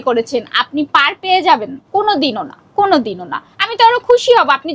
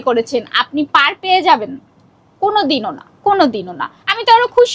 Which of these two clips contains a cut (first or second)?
first